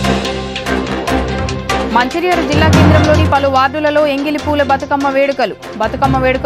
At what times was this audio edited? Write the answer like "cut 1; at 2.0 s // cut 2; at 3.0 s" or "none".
cut 1; at 1.9 s

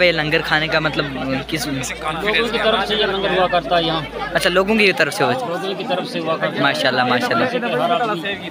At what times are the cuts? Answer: none

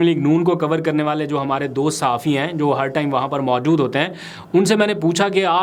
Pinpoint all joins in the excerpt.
none

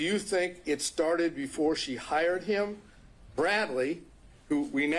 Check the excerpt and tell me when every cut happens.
cut 1; at 1.8 s

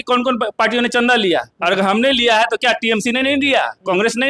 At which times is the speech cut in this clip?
none

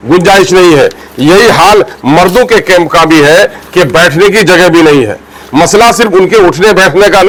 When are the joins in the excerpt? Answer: none

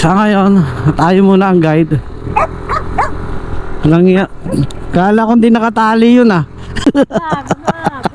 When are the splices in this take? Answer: cut 1; at 6.6 s

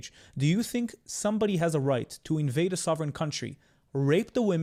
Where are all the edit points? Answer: none

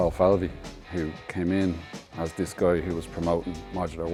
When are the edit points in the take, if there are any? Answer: none

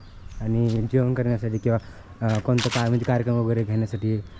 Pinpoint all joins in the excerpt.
none

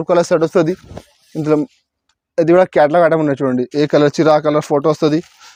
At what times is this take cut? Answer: none

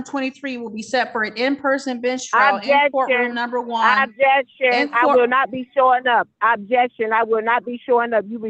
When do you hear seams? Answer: none

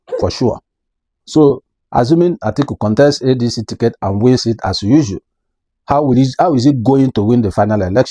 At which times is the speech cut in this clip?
cut 1; at 1.0 s

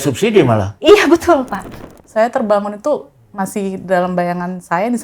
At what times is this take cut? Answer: cut 1; at 1.7 s

